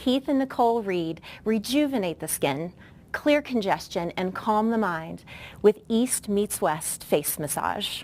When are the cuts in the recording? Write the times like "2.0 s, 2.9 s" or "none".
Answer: 4.7 s